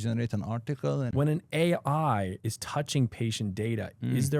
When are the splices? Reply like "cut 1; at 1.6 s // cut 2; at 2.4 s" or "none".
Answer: cut 1; at 1.1 s // cut 2; at 2.5 s